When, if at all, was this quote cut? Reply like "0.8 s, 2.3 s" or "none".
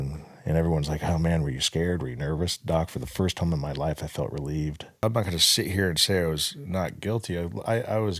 5.0 s